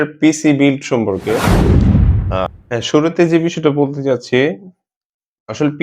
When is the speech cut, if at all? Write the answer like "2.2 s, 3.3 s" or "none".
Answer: 1.4 s, 2.1 s